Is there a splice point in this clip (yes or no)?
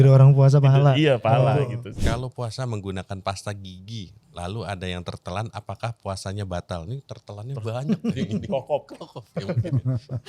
yes